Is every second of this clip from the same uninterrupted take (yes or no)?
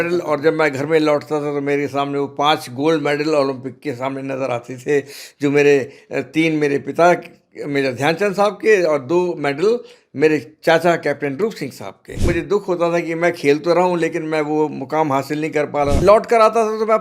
no